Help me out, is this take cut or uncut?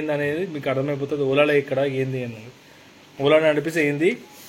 uncut